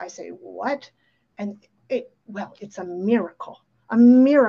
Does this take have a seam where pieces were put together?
no; 0 cuts

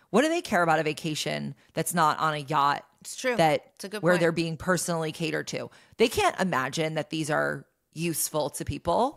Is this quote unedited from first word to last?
yes; 0 cuts

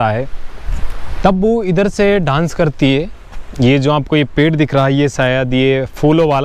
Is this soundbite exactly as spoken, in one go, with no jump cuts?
yes; 0 cuts

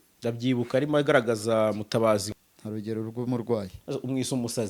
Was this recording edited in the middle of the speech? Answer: yes; 1 cut; at 2.2 s

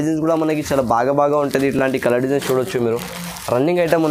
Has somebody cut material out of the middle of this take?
no; 0 cuts

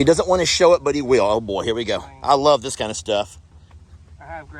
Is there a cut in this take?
no; 0 cuts

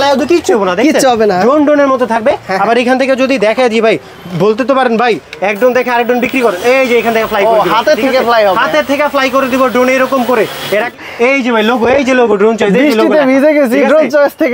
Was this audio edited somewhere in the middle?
yes; 1 cut; at 10.9 s

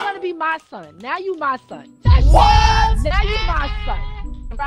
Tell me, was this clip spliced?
no; 0 cuts

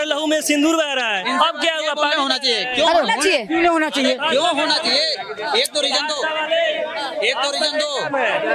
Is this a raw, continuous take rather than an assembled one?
yes; 0 cuts

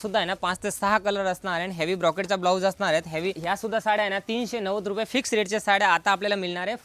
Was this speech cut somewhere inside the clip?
yes; 1 cut; at 3.4 s

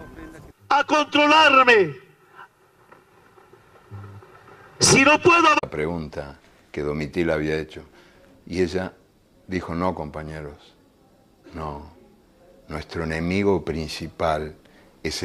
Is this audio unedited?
yes; 0 cuts

